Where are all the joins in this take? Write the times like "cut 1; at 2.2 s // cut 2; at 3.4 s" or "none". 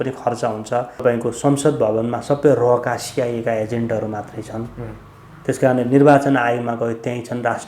cut 1; at 1.0 s